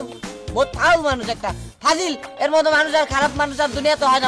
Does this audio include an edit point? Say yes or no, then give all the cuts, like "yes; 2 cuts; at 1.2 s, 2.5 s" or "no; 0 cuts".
no; 0 cuts